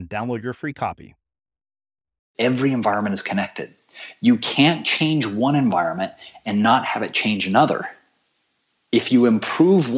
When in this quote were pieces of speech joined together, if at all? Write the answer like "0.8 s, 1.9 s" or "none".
2.3 s